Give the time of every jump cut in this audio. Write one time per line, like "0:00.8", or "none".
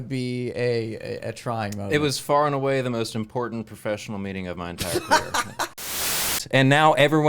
0:06.3